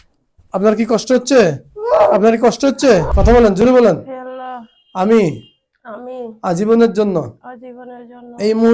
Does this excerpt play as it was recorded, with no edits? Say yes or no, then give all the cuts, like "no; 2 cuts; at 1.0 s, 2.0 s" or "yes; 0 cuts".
no; 1 cut; at 3.1 s